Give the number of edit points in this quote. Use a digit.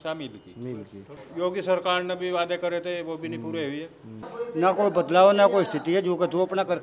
2